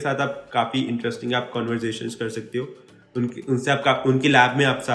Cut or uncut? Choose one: uncut